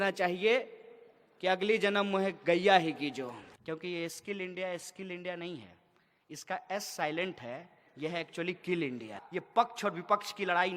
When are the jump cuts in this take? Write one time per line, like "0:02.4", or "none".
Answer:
0:03.5
0:09.2